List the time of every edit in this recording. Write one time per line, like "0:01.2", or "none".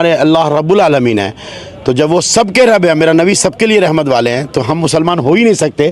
none

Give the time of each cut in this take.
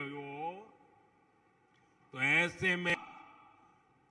0:02.9

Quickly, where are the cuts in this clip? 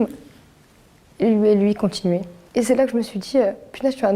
0:02.4

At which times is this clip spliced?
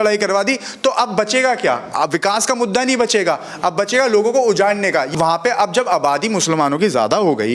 0:05.1

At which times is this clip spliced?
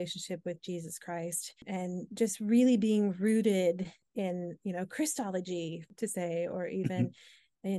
0:01.6
0:04.0
0:05.8

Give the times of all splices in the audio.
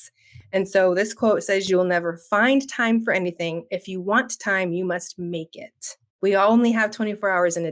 0:06.1

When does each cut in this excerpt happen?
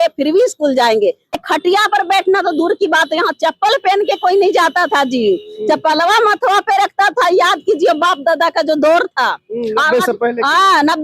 0:01.4

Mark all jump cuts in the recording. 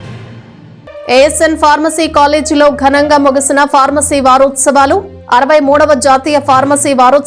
0:00.9

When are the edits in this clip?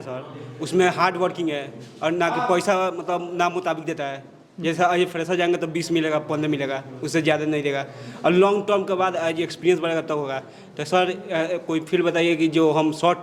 none

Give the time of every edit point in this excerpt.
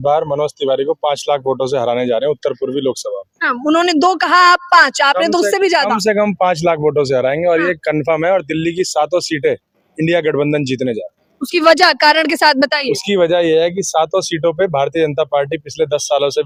none

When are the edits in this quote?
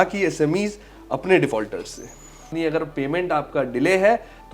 0:02.5

